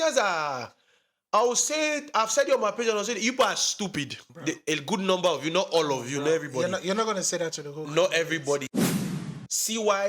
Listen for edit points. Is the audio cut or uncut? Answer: cut